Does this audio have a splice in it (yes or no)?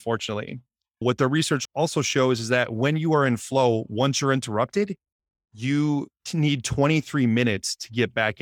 yes